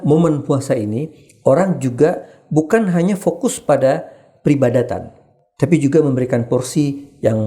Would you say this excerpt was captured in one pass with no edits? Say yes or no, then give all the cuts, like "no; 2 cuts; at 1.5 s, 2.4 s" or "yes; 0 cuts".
yes; 0 cuts